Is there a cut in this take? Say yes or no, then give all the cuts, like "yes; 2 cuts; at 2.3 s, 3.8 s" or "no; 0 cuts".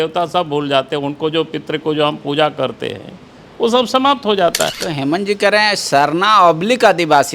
yes; 1 cut; at 4.8 s